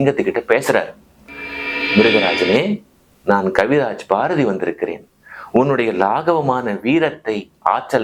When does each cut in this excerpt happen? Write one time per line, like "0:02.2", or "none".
none